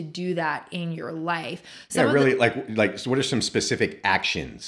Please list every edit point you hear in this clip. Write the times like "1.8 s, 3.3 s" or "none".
none